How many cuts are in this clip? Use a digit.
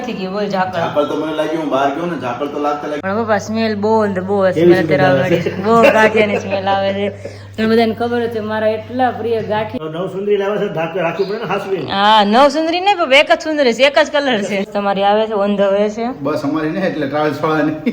3